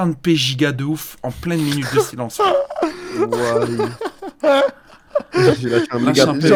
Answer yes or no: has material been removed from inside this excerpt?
no